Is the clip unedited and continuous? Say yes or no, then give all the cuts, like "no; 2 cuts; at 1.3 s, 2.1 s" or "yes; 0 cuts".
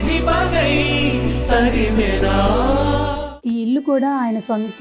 no; 1 cut; at 3.3 s